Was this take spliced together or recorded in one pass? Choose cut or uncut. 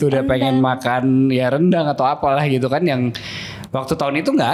uncut